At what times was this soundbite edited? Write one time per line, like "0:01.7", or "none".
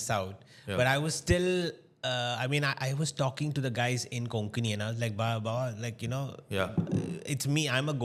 none